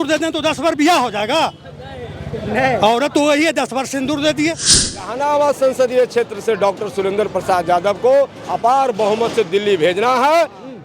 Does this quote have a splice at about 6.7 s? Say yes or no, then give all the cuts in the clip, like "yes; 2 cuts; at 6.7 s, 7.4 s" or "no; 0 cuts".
no; 1 cut; at 5.0 s